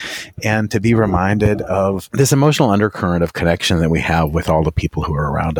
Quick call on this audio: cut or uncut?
cut